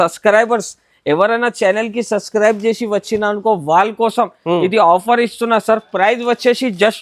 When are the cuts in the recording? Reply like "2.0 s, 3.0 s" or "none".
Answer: none